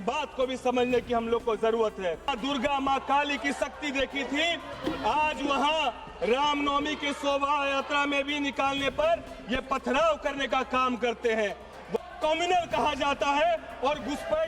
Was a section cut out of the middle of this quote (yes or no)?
yes